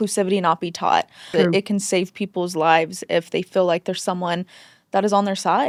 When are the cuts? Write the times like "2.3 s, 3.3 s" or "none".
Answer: none